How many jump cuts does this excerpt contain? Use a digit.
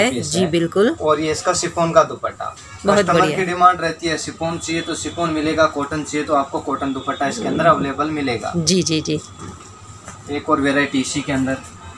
0